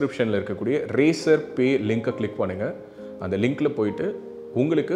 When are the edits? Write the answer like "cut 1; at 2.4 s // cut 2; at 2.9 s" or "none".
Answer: none